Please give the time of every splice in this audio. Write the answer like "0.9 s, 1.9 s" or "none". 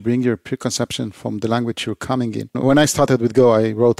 2.6 s